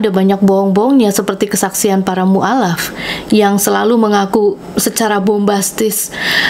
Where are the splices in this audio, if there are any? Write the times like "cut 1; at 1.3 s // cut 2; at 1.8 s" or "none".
none